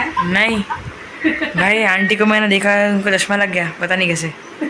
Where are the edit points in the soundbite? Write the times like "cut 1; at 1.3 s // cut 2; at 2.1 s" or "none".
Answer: none

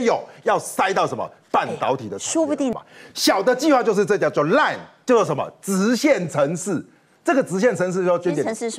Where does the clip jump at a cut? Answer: cut 1; at 2.7 s

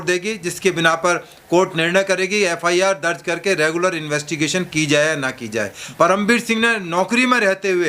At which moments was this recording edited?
cut 1; at 5.8 s

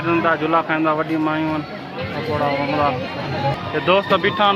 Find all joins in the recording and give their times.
cut 1; at 3.6 s

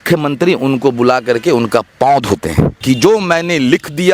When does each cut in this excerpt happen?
cut 1; at 2.8 s

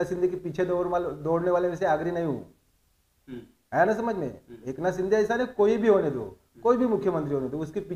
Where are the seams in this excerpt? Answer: none

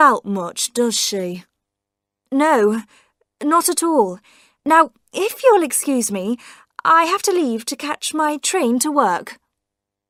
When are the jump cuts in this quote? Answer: none

